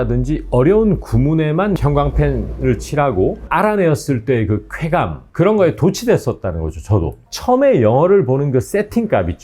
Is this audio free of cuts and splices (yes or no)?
no